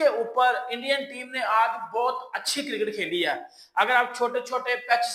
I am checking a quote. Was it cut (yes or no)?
no